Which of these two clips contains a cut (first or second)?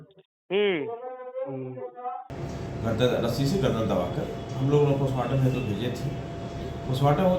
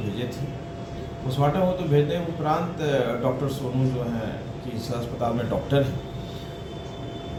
first